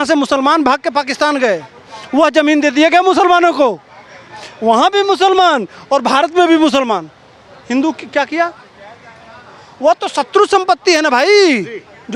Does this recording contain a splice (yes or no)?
no